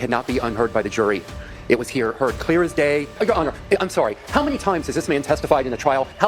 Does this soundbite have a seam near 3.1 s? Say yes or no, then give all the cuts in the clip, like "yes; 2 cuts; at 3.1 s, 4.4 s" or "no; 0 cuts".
yes; 1 cut; at 3.1 s